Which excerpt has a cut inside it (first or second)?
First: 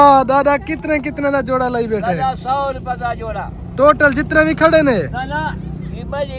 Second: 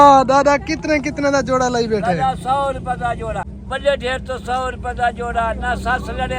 second